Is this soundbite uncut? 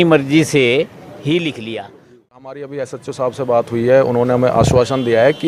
no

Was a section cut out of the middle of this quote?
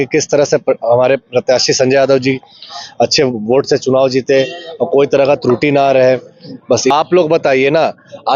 yes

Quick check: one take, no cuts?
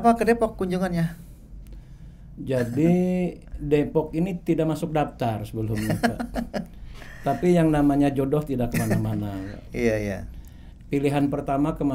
yes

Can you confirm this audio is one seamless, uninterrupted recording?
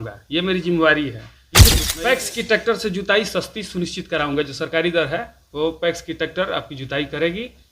no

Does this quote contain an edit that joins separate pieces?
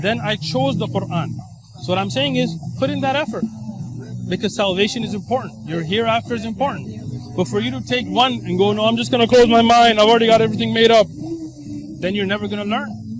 no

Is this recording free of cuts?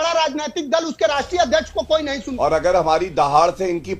no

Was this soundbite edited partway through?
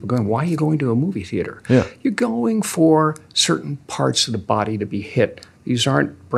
no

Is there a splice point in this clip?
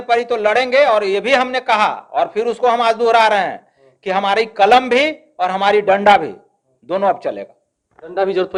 no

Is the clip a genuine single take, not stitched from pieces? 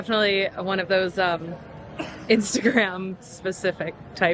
yes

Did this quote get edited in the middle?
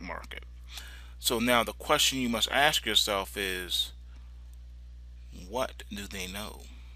no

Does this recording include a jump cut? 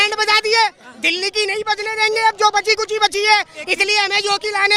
no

